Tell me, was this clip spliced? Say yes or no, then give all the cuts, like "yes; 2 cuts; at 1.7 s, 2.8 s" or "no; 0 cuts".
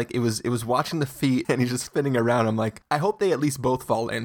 yes; 2 cuts; at 1.4 s, 2.8 s